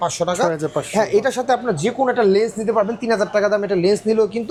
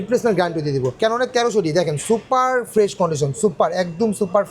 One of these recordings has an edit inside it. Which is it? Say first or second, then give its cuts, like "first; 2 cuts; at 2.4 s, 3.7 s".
second; 1 cut; at 0.9 s